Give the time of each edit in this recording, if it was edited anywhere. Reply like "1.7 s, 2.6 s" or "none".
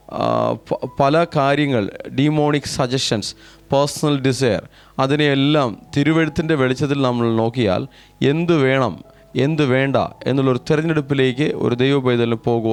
none